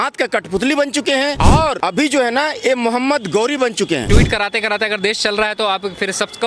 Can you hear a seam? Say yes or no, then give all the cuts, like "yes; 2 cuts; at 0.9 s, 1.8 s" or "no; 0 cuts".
yes; 2 cuts; at 1.5 s, 4.0 s